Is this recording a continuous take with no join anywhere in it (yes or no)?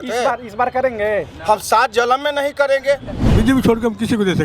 no